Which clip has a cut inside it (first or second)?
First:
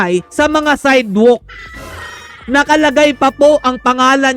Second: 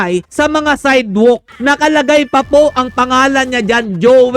second